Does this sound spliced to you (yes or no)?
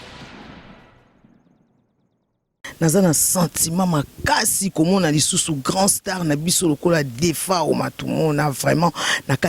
yes